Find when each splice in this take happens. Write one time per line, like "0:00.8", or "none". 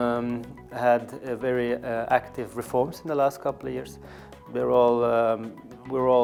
none